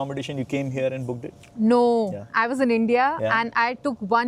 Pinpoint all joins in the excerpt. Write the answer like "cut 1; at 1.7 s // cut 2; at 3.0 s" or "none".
none